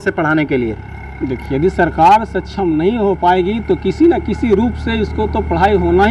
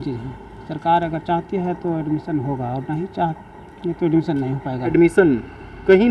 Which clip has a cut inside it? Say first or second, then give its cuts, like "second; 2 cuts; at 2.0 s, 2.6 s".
second; 1 cut; at 4.9 s